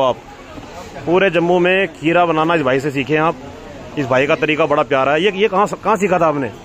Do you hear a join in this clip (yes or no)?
no